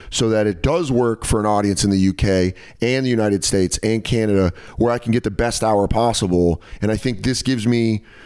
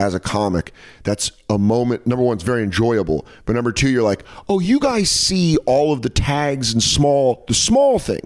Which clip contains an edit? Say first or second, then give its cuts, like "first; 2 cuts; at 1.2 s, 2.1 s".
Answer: first; 1 cut; at 6.7 s